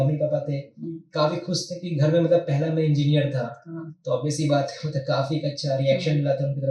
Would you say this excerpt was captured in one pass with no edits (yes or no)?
yes